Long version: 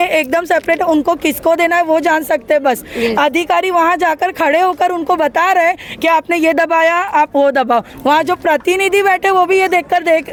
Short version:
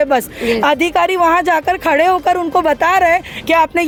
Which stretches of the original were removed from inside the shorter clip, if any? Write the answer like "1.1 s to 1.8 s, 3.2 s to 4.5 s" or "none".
none